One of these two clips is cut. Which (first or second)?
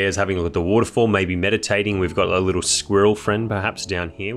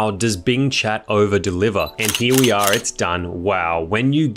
second